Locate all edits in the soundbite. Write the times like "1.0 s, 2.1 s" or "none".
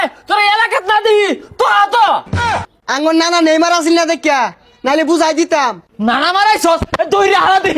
2.4 s, 5.8 s